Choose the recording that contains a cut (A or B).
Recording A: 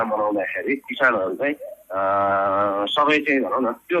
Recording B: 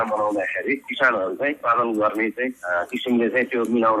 B